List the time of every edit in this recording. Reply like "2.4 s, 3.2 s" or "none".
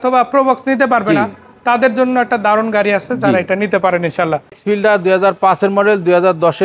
4.6 s